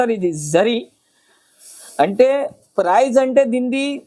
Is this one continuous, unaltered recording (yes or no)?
yes